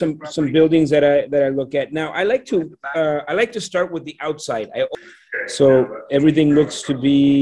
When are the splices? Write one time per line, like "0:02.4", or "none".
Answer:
0:04.9